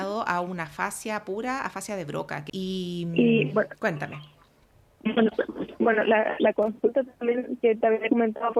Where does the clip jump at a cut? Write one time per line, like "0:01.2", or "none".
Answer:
none